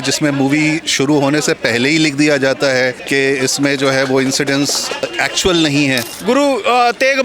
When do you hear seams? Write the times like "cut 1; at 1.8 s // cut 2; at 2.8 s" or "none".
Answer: cut 1; at 3.0 s // cut 2; at 5.1 s // cut 3; at 6.1 s